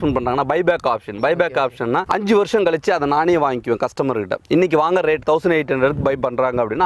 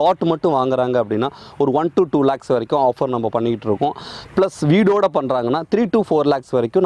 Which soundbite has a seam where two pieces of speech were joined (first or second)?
first